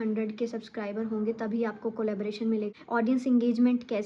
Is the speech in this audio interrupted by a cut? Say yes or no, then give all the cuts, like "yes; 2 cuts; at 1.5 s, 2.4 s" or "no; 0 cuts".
yes; 1 cut; at 2.7 s